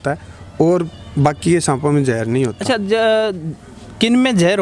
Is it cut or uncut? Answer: uncut